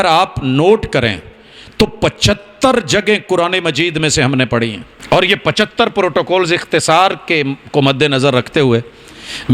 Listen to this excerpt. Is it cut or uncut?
cut